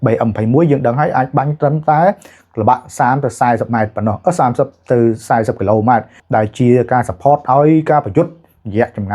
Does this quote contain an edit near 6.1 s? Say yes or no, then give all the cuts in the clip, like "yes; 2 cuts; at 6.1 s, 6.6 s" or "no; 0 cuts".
yes; 1 cut; at 6.1 s